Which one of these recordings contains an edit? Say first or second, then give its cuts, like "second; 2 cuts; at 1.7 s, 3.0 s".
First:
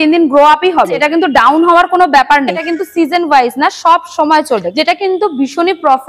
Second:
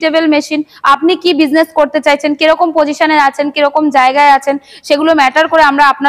first; 3 cuts; at 1.0 s, 2.7 s, 4.7 s